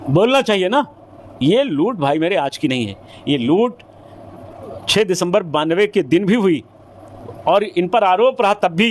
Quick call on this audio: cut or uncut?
uncut